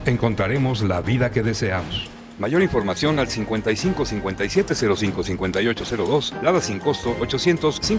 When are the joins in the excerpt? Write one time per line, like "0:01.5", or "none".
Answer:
none